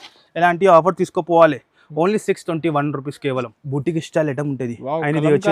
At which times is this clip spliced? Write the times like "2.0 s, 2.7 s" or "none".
3.6 s